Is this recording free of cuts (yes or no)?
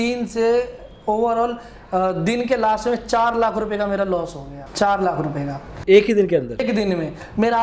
yes